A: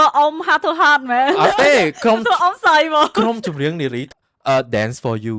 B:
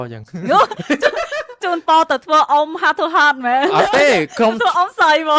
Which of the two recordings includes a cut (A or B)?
A